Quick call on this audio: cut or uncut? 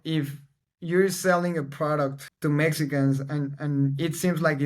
cut